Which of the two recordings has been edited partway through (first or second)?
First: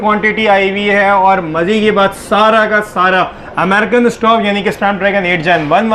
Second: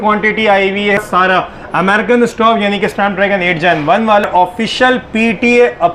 second